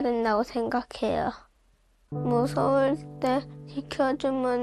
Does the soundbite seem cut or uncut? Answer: cut